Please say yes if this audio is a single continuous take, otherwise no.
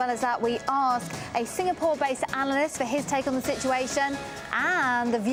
yes